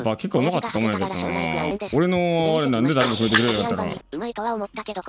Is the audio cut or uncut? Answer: cut